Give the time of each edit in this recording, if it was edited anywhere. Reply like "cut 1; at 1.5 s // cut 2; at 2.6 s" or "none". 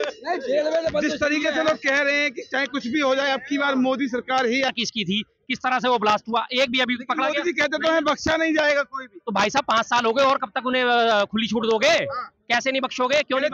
cut 1; at 4.7 s